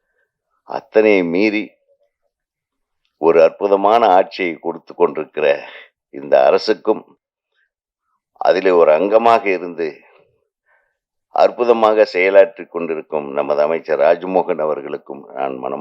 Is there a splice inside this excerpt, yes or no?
no